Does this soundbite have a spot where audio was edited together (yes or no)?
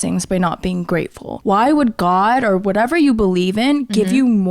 yes